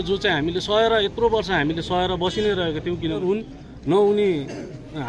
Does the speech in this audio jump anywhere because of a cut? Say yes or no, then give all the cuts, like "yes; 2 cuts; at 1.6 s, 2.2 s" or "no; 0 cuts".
yes; 1 cut; at 3.2 s